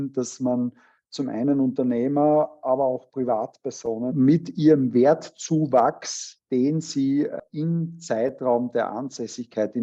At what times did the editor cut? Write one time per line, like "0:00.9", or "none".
0:04.1

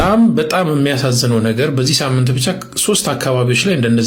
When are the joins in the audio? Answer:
none

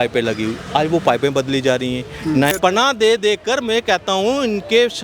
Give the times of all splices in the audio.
0:02.5

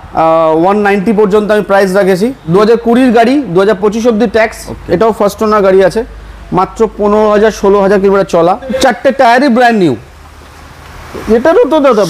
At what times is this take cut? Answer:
0:02.5
0:08.8

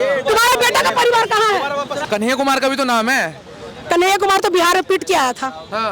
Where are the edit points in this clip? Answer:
0:02.0

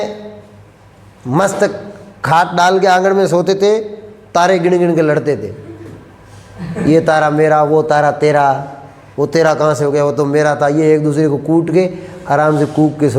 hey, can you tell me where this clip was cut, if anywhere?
none

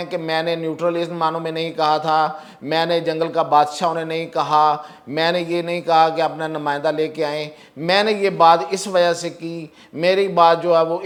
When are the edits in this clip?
none

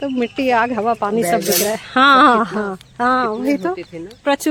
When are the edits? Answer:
none

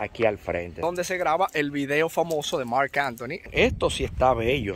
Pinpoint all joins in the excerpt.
0:00.8
0:03.5

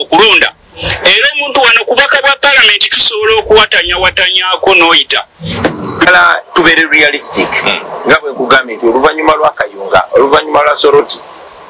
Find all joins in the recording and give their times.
0:06.1

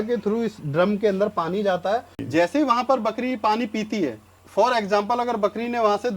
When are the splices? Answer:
0:02.1

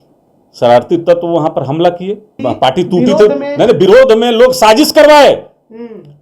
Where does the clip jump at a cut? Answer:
0:02.3

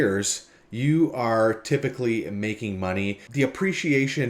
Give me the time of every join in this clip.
0:03.2

